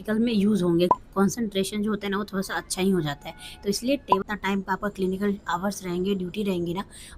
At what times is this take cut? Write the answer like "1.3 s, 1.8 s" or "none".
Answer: 0.9 s, 4.2 s